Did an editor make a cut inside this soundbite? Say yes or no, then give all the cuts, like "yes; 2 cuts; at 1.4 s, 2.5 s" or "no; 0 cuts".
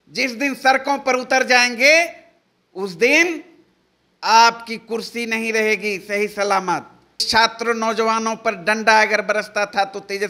yes; 1 cut; at 7.2 s